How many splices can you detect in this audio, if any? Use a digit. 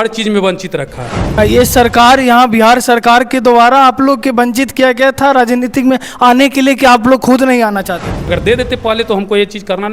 2